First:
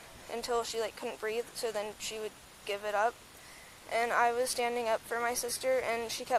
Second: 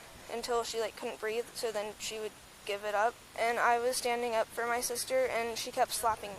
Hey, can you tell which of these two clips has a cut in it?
second; 1 cut; at 3.2 s

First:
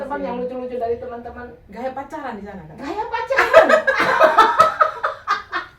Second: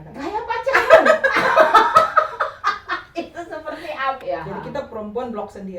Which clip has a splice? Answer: second; 1 cut; at 4.2 s

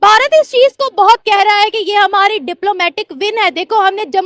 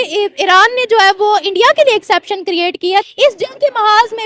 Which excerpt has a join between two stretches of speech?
second; 1 cut; at 3.1 s

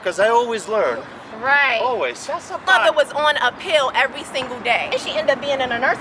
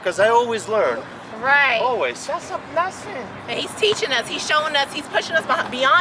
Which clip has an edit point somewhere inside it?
first; 2 cuts; at 2.6 s, 4.9 s

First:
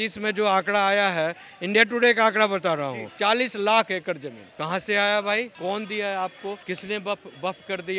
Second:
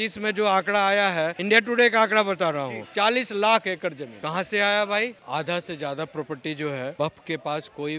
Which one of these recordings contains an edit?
second; 4 cuts; at 1.4 s, 4.1 s, 5.2 s, 6.9 s

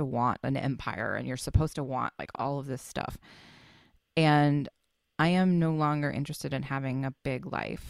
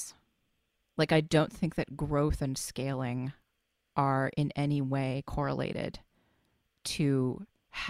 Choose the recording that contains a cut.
first; 1 cut; at 2.2 s

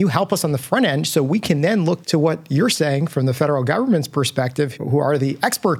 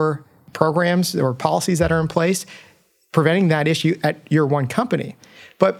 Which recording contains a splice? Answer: first; 2 cuts; at 2.0 s, 4.7 s

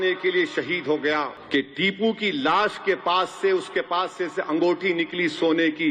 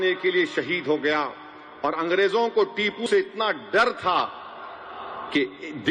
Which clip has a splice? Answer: first; 1 cut; at 1.4 s

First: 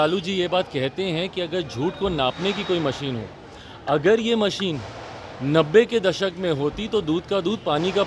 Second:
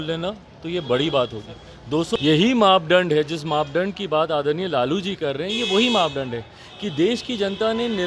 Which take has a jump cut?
second; 1 cut; at 2.2 s

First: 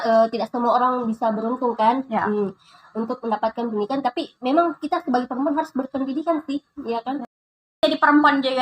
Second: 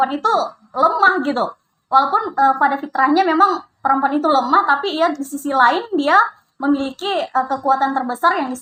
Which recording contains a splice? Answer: first; 1 cut; at 7.3 s

